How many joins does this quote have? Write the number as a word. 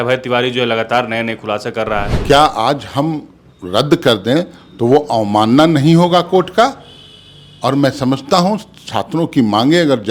one